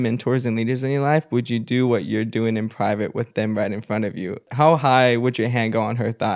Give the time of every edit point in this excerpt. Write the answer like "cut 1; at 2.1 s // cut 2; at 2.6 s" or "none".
cut 1; at 4.5 s

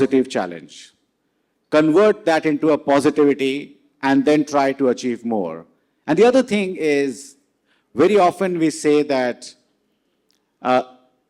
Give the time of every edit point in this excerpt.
none

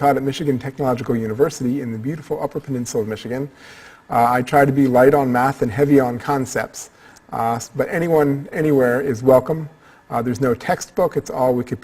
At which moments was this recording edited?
cut 1; at 4.9 s

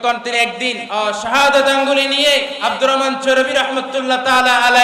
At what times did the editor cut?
cut 1; at 0.8 s // cut 2; at 2.5 s

